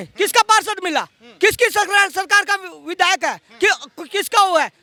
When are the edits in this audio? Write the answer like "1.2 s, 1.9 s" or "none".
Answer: none